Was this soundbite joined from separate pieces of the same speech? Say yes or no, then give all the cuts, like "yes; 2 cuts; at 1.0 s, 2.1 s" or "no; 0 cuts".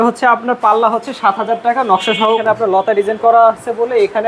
yes; 1 cut; at 2.4 s